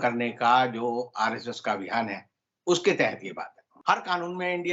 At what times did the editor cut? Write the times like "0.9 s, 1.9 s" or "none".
3.7 s